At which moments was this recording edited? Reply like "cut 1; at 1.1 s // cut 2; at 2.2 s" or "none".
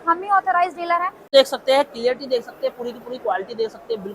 cut 1; at 1.2 s

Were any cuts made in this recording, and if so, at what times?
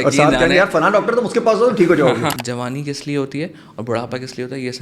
cut 1; at 2.3 s

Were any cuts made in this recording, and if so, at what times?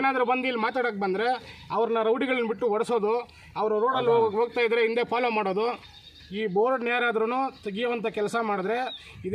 cut 1; at 6.0 s

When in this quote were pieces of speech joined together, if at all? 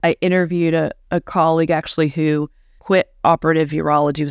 none

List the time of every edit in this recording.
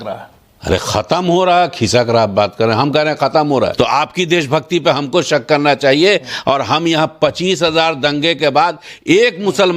cut 1; at 3.7 s

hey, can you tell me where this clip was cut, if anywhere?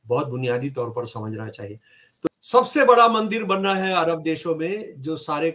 cut 1; at 2.3 s

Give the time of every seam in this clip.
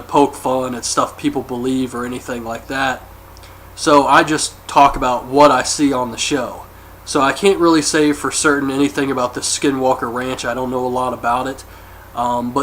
cut 1; at 10.4 s

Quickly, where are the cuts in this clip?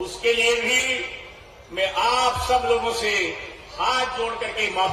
none

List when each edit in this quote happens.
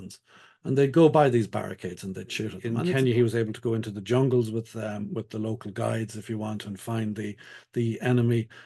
cut 1; at 2.7 s

